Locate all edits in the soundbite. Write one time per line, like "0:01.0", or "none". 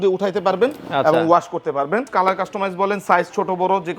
0:02.1

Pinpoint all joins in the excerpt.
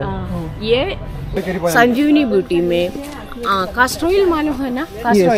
0:01.4

